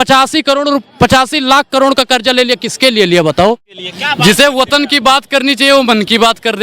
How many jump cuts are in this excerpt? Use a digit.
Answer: 1